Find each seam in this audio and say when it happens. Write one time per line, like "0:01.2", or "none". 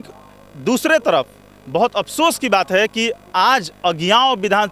none